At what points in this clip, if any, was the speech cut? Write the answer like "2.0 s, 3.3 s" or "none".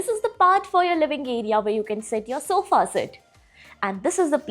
none